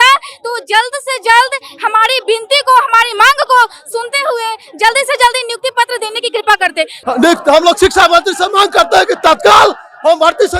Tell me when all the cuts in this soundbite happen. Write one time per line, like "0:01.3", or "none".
0:07.0